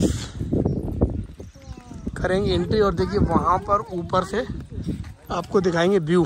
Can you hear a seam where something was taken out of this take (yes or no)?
no